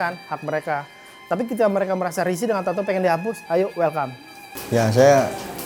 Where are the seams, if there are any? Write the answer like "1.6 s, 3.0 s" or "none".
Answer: 4.5 s